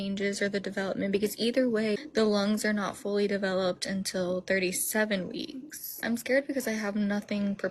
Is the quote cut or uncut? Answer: cut